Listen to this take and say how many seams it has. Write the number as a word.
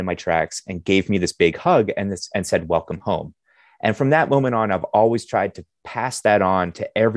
zero